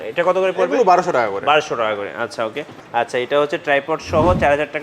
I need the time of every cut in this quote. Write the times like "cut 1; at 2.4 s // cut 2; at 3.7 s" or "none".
cut 1; at 2.7 s